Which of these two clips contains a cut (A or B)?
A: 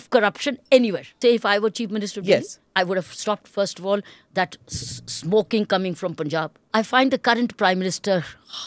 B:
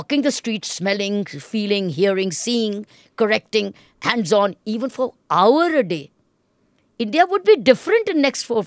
A